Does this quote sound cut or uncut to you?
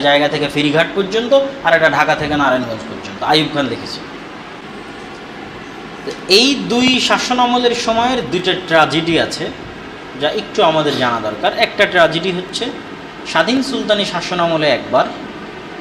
cut